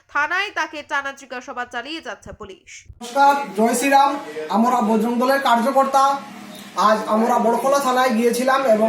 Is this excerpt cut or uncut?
cut